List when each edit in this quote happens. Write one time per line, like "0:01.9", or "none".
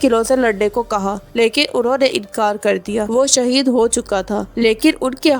0:03.1